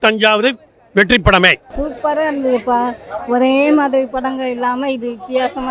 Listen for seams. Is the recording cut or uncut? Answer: cut